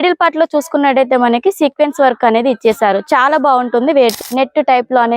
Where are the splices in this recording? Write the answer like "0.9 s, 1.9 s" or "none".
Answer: 4.1 s